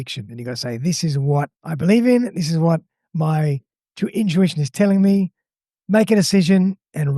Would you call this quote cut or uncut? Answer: cut